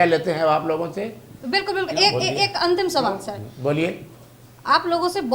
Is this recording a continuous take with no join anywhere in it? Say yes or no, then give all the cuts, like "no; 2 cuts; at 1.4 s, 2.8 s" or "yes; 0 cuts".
yes; 0 cuts